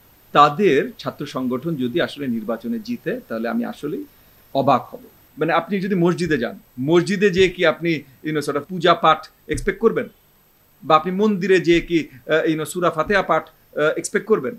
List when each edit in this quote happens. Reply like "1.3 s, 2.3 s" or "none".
5.2 s